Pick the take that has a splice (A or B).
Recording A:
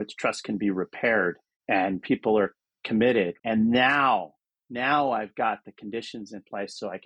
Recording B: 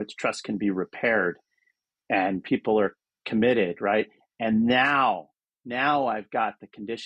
A